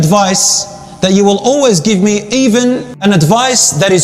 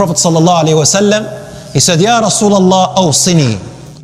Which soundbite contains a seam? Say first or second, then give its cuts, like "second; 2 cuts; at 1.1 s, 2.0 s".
first; 1 cut; at 2.9 s